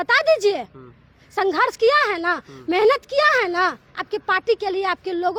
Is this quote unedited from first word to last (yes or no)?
yes